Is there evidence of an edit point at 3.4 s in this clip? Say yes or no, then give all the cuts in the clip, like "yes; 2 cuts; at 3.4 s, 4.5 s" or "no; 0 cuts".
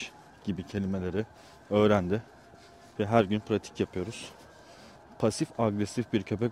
no; 1 cut; at 5.1 s